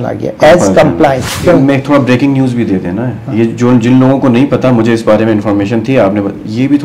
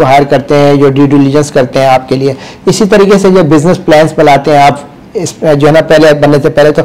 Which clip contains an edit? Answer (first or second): first